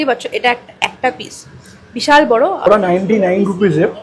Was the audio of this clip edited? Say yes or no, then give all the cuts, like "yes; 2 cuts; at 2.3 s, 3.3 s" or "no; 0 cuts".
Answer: yes; 1 cut; at 2.6 s